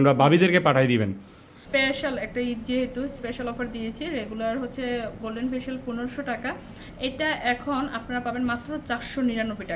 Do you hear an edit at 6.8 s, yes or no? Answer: no